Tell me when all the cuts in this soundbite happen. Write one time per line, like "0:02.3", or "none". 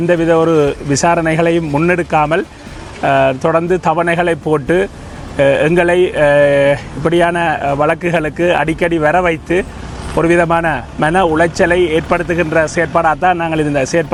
none